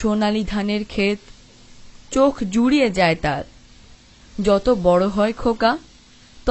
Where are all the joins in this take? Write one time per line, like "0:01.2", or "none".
0:04.2